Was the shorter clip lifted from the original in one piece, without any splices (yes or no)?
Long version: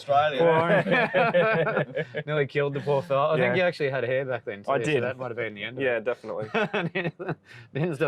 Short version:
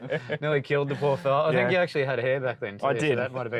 yes